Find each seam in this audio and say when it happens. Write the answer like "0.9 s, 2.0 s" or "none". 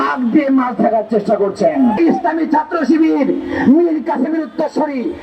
2.0 s